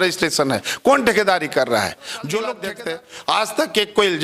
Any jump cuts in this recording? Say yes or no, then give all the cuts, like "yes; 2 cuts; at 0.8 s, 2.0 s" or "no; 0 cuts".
yes; 1 cut; at 2.7 s